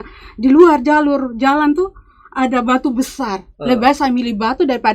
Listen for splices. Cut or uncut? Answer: uncut